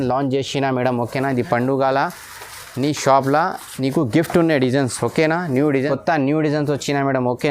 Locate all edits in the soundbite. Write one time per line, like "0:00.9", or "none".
0:05.8